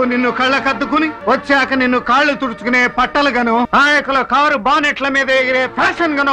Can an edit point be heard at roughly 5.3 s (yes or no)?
no